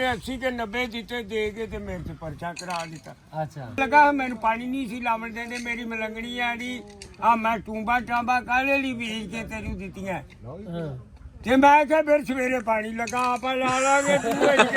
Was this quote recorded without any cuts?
no; 1 cut; at 3.8 s

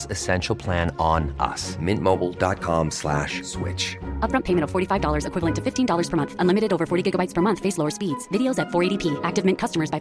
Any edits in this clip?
no; 0 cuts

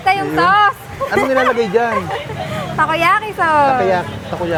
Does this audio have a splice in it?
no; 0 cuts

